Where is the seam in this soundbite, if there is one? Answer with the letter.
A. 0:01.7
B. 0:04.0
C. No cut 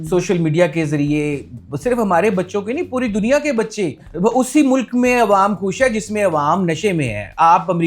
B